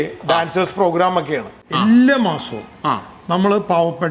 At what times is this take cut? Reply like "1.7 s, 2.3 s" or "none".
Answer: 1.6 s